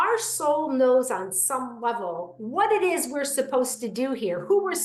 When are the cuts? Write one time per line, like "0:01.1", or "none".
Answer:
none